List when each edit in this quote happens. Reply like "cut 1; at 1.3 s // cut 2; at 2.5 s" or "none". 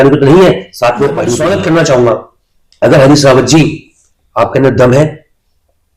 cut 1; at 1.3 s